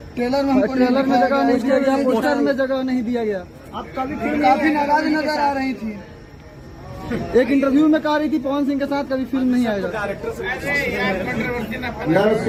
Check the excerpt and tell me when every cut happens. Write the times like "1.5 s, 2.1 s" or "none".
none